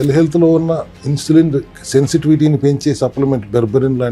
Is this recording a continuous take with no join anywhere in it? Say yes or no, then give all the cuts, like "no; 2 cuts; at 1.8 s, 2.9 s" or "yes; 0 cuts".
yes; 0 cuts